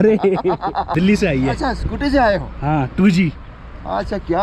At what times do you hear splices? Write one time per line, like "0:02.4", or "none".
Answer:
0:00.9